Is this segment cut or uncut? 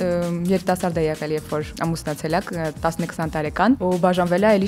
cut